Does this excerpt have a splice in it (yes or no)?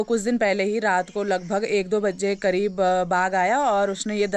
no